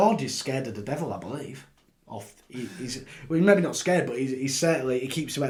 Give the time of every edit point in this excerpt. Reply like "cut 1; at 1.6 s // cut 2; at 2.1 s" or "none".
none

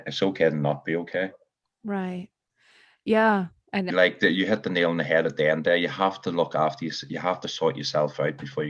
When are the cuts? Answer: cut 1; at 3.9 s

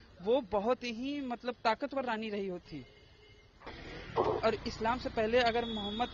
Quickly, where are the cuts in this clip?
cut 1; at 3.7 s

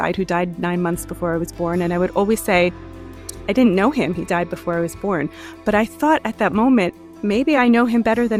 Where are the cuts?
none

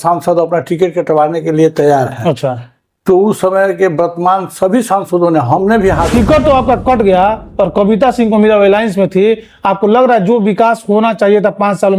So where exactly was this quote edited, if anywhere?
cut 1; at 6.1 s

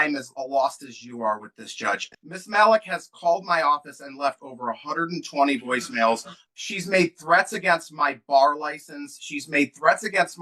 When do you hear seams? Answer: cut 1; at 2.1 s // cut 2; at 6.3 s

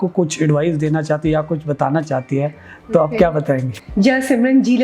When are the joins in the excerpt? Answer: cut 1; at 3.8 s

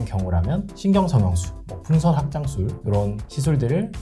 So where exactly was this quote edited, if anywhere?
cut 1; at 3.1 s

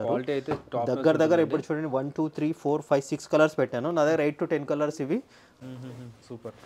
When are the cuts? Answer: cut 1; at 5.4 s

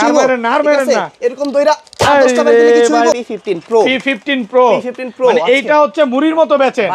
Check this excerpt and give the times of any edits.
cut 1; at 3.1 s

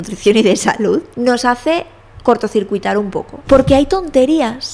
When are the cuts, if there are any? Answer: cut 1; at 1.1 s // cut 2; at 3.3 s

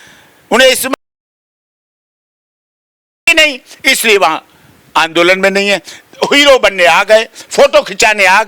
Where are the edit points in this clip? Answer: none

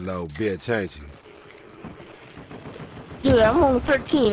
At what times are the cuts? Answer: cut 1; at 1.1 s

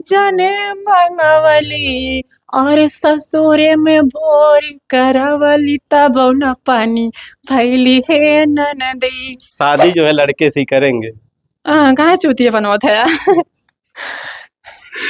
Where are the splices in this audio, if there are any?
cut 1; at 9.5 s

